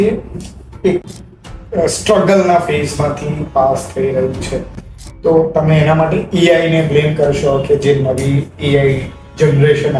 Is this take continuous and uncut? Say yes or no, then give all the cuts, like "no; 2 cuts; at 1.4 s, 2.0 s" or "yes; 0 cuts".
yes; 0 cuts